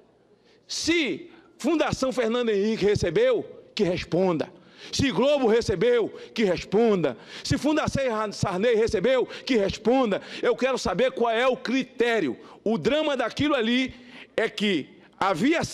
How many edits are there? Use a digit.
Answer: 0